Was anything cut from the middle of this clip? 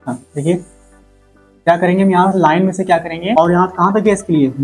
yes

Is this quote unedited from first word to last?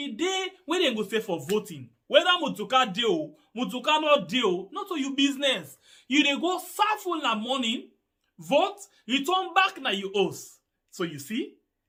yes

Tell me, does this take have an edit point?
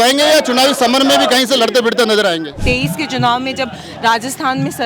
yes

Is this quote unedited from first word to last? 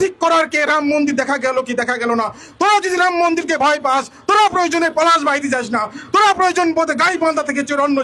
yes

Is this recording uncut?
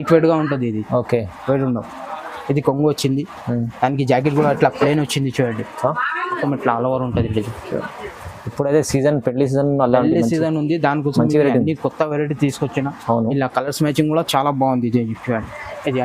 no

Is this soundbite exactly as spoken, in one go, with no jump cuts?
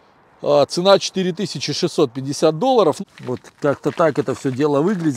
no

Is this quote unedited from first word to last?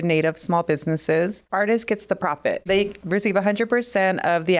no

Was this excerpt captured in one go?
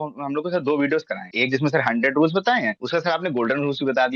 no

